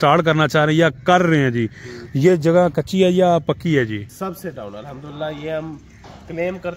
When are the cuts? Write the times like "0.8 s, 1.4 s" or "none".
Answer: 4.1 s